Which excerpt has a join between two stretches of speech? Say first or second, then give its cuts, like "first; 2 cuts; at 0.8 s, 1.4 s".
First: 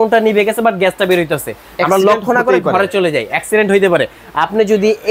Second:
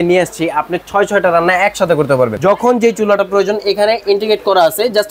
second; 1 cut; at 2.4 s